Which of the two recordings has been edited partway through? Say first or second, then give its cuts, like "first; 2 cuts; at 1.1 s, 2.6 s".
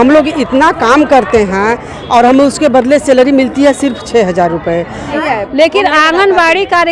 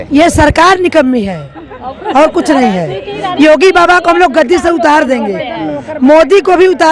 first; 1 cut; at 5.2 s